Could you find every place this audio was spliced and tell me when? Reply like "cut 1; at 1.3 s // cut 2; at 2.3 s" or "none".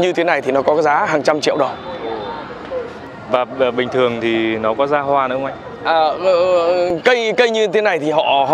none